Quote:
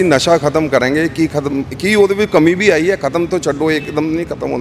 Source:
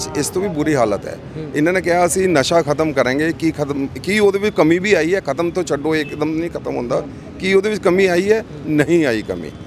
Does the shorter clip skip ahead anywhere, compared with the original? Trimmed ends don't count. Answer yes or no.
no